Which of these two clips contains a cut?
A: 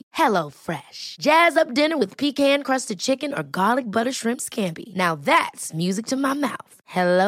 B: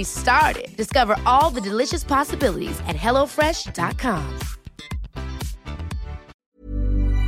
B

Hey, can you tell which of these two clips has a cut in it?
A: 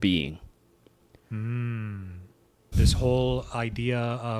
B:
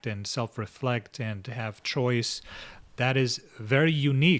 A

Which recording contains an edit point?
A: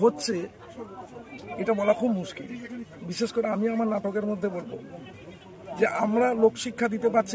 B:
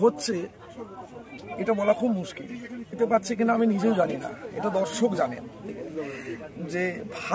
B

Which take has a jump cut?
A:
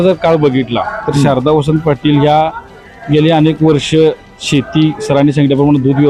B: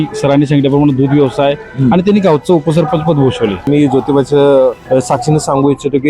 B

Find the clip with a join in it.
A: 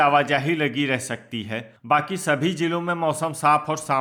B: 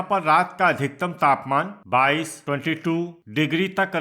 B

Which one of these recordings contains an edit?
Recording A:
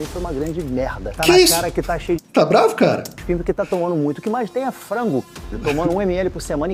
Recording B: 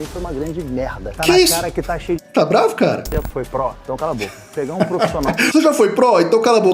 B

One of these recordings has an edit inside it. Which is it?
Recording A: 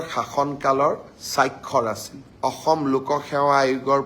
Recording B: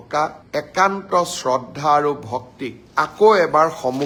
A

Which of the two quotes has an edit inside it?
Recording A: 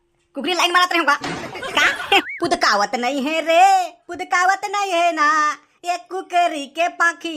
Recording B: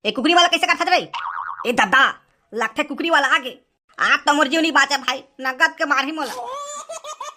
A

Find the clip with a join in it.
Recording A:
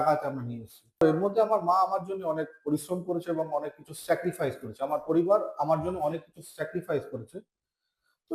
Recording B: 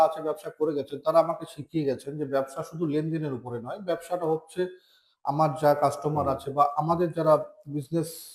A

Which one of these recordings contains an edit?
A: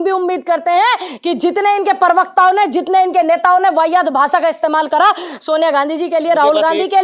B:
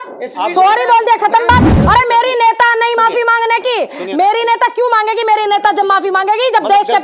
B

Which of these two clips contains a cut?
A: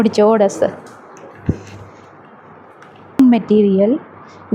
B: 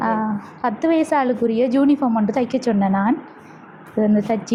A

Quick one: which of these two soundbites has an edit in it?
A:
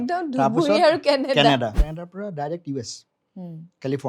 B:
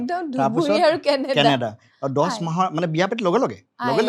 A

